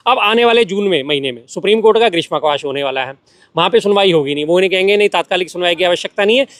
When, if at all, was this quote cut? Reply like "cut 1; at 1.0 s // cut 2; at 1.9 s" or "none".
none